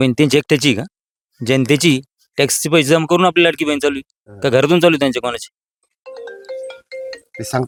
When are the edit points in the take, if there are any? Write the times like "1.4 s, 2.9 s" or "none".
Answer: none